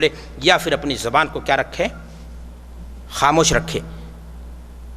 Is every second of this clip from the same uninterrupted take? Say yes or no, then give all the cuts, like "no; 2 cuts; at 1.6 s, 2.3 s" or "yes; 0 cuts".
yes; 0 cuts